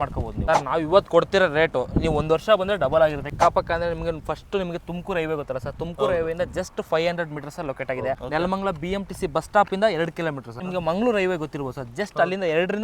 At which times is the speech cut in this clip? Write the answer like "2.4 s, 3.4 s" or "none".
3.3 s, 8.2 s, 10.6 s